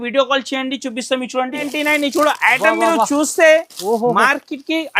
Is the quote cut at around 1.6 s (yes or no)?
yes